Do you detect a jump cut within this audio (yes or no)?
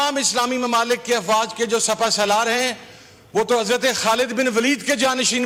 no